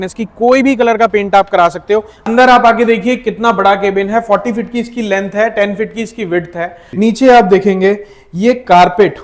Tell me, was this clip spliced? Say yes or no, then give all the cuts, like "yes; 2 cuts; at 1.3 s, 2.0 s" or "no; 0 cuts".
yes; 2 cuts; at 2.2 s, 6.8 s